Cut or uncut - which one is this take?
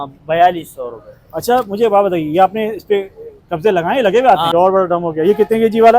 cut